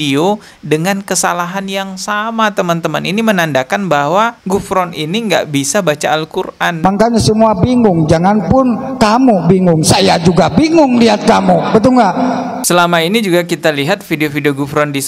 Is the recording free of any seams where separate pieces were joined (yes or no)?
yes